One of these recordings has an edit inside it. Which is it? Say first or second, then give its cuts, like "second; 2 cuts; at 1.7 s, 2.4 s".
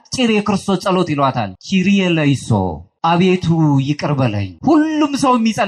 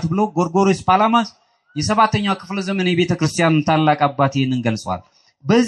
first; 3 cuts; at 1.5 s, 2.8 s, 4.5 s